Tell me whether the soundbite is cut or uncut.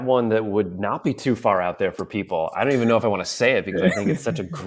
uncut